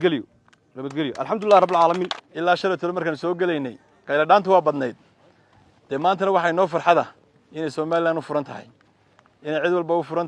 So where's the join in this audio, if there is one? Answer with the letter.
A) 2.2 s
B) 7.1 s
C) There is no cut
A